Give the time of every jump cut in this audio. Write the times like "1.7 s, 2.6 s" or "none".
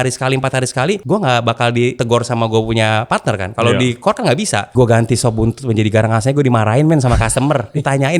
1.0 s, 2.0 s, 4.7 s

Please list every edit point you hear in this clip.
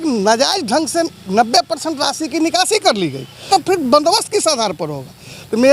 3.4 s

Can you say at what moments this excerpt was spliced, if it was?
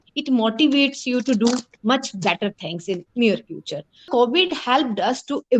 4.1 s

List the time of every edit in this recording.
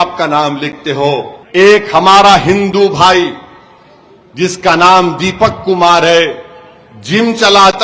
1.4 s

